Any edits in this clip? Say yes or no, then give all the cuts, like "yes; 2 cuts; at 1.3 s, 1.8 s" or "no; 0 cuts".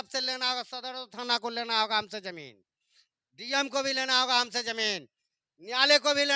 no; 0 cuts